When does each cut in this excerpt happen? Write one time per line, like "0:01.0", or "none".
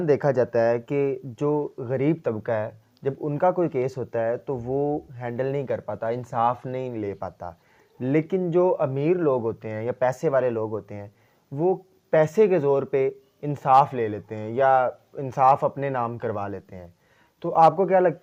none